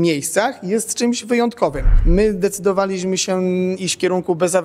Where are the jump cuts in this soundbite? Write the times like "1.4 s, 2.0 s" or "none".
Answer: 1.9 s